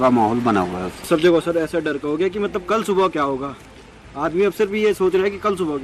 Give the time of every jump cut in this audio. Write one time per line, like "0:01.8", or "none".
0:01.1